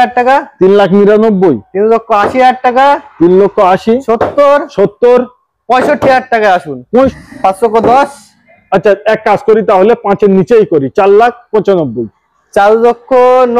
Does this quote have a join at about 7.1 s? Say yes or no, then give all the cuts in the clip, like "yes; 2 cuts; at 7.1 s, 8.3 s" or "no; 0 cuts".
yes; 1 cut; at 7.1 s